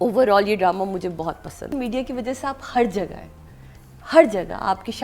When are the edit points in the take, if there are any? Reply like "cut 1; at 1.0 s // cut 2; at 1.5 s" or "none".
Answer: cut 1; at 1.7 s